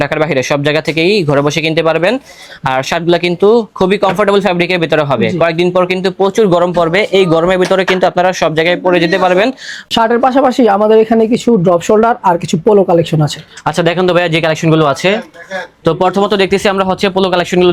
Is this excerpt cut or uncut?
uncut